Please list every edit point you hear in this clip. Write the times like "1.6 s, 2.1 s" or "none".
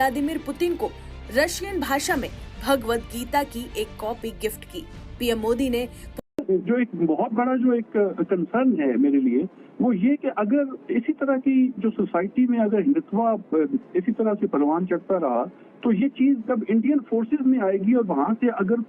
6.2 s